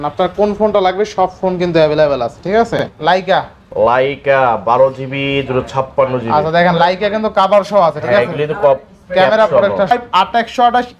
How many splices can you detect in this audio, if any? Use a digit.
2